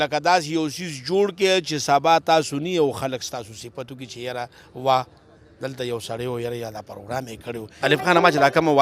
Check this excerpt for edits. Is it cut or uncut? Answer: cut